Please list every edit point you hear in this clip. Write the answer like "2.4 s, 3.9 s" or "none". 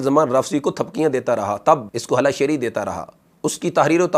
1.9 s

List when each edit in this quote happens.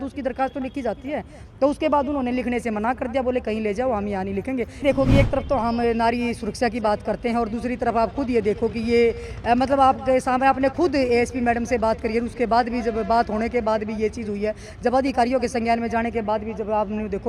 4.8 s

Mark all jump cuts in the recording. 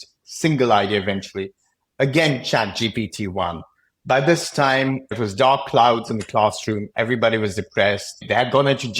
5.1 s, 8.2 s

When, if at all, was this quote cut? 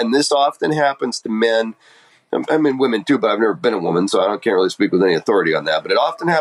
none

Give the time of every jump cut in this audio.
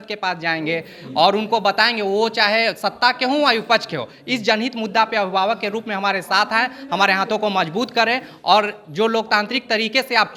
none

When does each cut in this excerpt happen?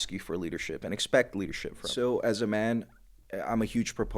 1.9 s

